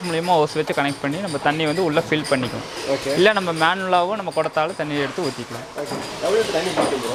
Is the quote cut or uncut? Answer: uncut